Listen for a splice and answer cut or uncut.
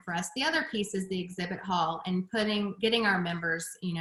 uncut